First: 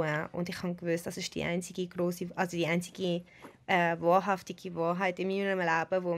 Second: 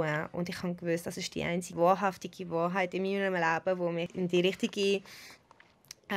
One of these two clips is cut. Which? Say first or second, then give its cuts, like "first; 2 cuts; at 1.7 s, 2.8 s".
second; 2 cuts; at 1.7 s, 4.1 s